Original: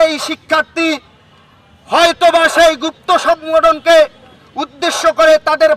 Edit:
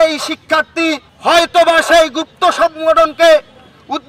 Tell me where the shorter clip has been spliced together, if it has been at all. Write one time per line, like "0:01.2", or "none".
0:01.1